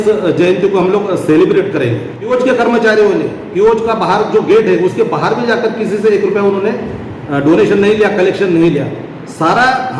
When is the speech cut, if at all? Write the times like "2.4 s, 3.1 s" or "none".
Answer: 2.3 s